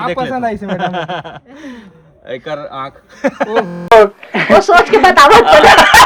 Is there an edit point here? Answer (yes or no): no